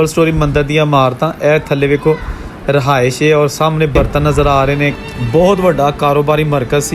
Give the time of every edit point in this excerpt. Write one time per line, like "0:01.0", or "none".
0:04.9